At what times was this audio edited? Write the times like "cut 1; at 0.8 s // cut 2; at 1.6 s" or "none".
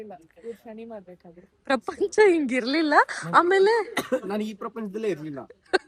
none